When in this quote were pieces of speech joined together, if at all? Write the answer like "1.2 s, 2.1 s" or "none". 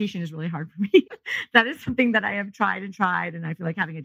1.7 s